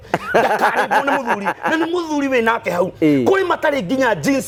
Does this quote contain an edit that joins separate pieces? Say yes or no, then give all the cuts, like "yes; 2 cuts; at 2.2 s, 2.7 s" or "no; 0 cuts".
no; 0 cuts